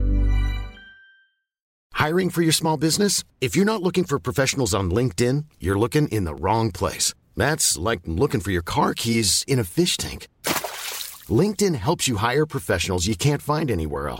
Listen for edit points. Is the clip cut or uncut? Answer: cut